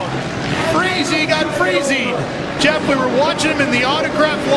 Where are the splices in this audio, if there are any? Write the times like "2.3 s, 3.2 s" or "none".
none